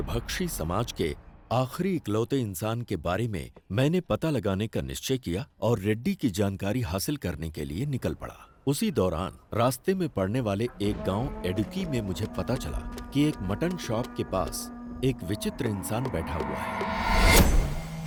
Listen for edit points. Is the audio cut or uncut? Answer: uncut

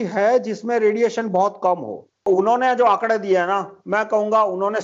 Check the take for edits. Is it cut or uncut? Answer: cut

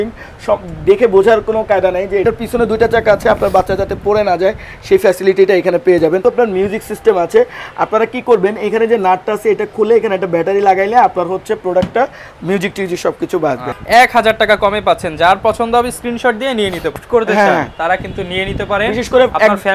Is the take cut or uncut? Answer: cut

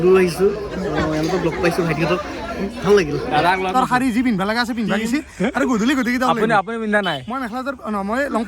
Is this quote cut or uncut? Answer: cut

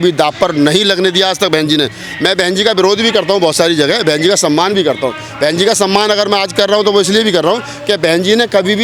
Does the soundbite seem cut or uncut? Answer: uncut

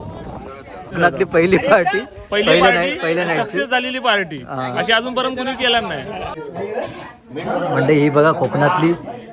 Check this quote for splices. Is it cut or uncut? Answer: cut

